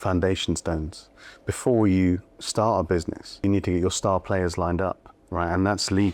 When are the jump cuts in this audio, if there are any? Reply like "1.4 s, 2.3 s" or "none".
1.0 s, 3.4 s, 5.1 s